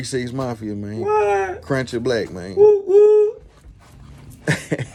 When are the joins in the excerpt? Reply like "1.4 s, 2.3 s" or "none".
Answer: none